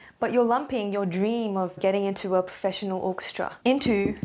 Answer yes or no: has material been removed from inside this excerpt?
no